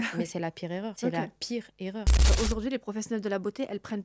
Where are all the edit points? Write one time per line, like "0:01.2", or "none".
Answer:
0:01.0
0:02.3